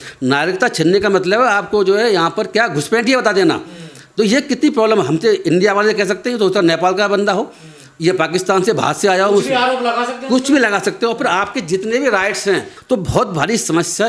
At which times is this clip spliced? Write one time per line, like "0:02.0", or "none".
0:12.7

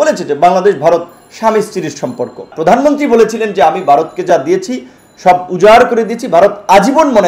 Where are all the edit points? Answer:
0:02.5

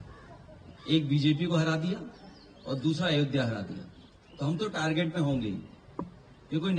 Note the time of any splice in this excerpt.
none

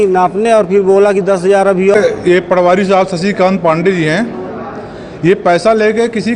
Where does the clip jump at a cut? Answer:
0:01.9

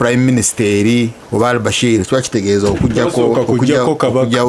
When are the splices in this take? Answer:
0:01.2

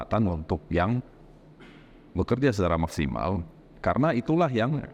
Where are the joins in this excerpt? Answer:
none

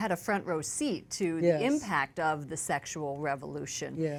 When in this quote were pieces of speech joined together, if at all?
none

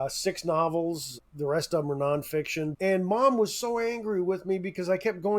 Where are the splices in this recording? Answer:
0:02.7

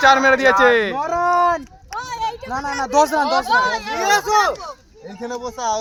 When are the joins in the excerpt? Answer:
none

